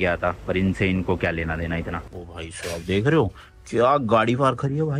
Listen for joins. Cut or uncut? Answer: cut